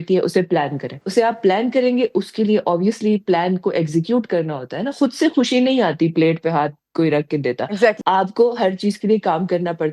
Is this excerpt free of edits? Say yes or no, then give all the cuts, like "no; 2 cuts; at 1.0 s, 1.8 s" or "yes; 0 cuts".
yes; 0 cuts